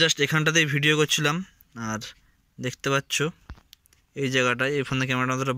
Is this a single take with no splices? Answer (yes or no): yes